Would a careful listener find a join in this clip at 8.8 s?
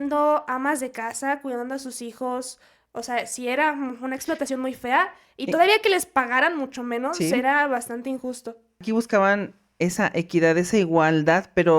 yes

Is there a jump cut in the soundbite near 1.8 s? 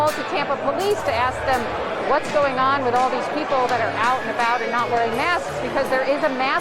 yes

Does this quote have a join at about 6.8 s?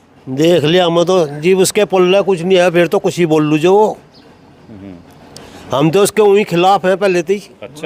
no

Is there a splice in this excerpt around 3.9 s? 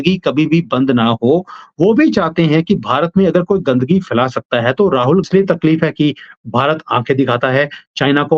no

